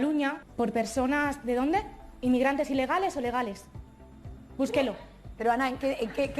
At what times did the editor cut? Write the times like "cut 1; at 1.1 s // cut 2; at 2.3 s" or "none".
none